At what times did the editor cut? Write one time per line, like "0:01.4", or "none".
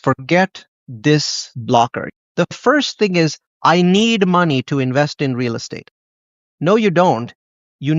0:02.0